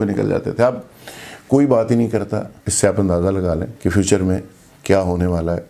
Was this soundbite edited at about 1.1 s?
no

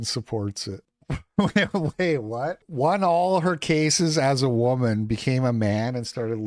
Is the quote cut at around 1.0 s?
yes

